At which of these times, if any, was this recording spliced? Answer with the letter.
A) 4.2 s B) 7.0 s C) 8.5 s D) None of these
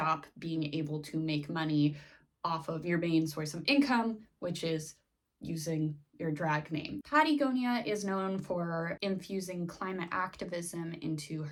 D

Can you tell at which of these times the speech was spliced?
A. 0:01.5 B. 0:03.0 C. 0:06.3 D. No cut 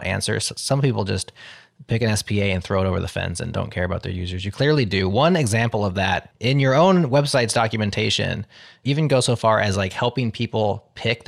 C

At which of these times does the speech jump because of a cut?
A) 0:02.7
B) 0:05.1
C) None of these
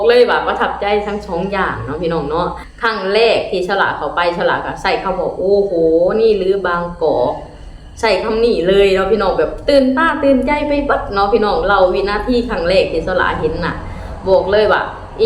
A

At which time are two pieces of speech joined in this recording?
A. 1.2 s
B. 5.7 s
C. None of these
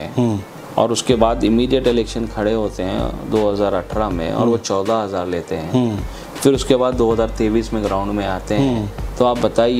C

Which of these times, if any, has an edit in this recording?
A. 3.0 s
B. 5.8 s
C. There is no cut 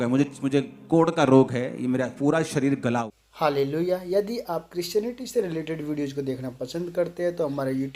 A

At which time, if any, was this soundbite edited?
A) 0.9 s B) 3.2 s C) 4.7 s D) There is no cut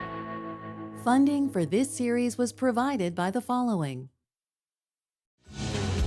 A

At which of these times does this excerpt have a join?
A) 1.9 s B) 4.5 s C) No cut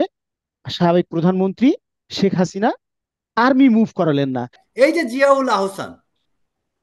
B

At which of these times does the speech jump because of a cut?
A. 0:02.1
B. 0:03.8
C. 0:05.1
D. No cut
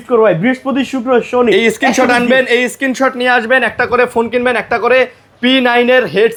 D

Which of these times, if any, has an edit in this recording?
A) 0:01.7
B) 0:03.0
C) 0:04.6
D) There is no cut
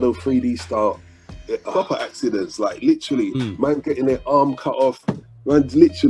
A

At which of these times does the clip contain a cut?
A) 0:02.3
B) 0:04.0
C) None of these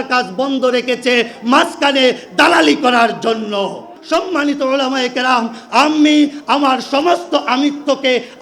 B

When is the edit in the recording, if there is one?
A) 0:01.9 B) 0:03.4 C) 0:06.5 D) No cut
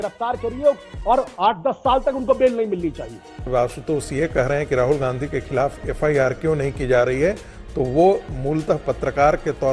B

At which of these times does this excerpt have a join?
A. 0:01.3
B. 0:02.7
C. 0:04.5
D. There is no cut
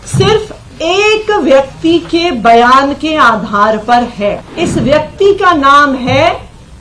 C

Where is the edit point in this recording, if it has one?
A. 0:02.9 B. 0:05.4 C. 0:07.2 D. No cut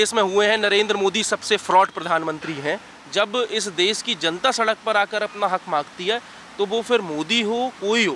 A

